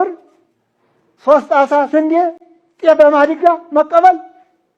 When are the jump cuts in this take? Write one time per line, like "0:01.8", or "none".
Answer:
none

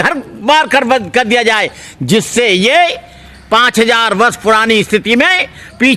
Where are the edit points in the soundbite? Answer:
none

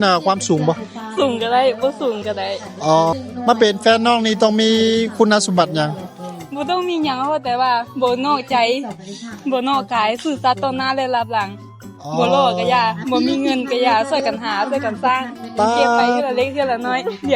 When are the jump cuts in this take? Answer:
0:03.1

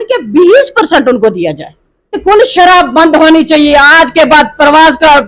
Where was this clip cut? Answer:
0:02.2

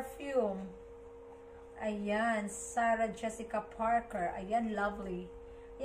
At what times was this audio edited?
none

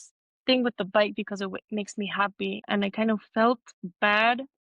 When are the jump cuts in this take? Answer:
0:02.6

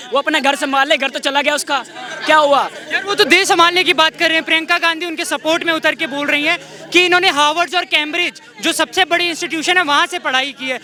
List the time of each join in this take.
none

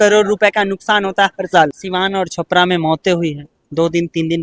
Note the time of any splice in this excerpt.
0:01.8

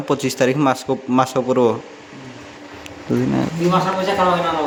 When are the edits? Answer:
none

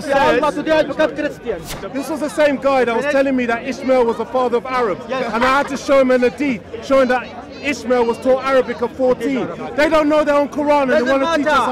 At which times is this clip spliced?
0:01.8

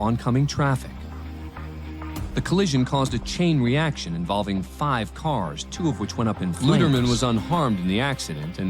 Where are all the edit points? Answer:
0:06.6

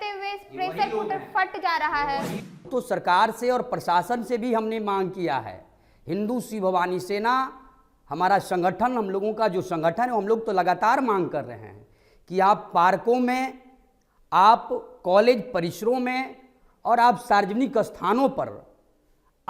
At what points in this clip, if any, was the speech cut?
0:02.6

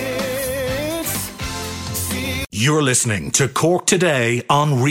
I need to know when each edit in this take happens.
0:02.4

